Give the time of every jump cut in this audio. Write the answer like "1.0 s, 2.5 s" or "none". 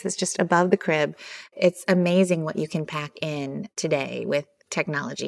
1.5 s, 3.7 s